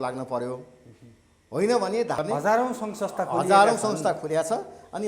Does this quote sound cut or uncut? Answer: cut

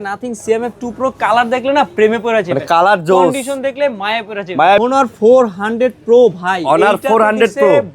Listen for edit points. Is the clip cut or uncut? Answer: cut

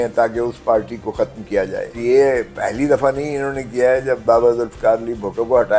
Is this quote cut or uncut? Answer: cut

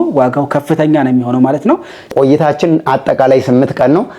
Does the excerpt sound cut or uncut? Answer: cut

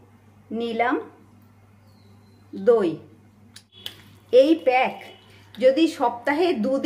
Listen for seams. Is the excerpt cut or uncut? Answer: cut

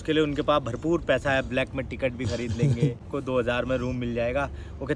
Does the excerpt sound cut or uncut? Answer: cut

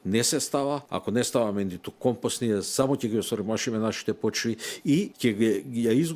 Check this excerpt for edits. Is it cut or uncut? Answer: cut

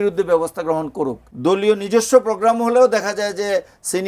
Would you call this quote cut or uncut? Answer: cut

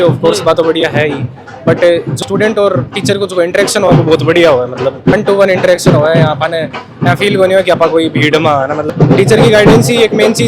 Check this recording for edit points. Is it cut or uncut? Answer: cut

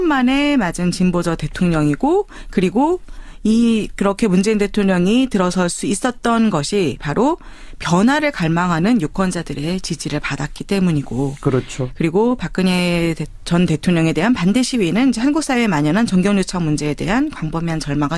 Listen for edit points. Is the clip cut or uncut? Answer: cut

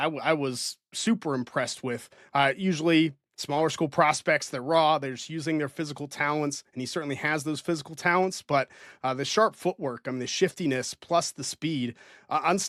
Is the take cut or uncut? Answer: uncut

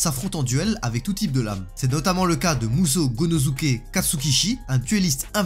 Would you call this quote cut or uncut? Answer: uncut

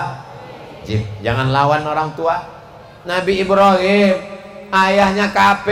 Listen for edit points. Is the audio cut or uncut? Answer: uncut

